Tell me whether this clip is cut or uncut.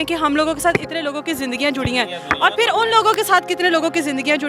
uncut